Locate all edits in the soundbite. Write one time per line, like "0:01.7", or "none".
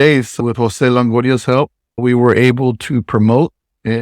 0:01.8